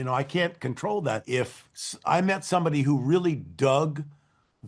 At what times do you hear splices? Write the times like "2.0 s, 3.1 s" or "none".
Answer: 1.2 s